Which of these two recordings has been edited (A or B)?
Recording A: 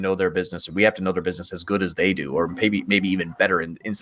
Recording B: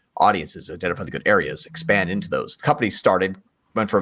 B